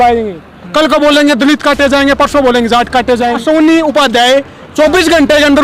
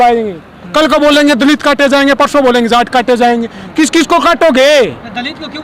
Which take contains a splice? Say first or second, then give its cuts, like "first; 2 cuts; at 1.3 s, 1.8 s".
first; 1 cut; at 3.4 s